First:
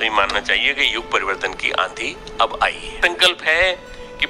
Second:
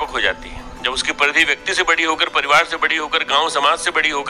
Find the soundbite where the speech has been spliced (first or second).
first